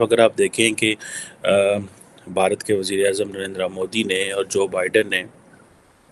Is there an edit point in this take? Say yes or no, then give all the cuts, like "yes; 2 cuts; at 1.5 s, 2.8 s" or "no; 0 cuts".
no; 0 cuts